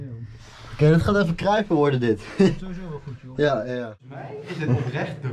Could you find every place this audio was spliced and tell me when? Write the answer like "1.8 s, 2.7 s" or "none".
4.2 s